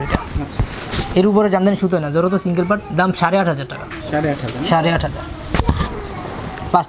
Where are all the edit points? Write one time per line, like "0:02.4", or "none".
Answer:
none